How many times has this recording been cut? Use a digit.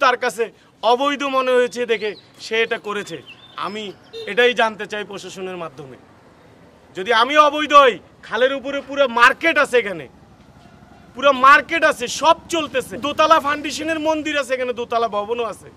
1